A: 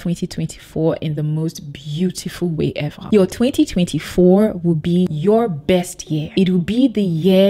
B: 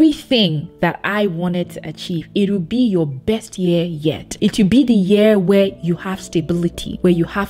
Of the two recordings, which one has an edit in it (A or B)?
A